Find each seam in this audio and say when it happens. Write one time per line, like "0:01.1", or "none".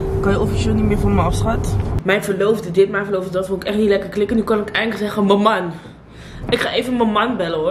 0:02.0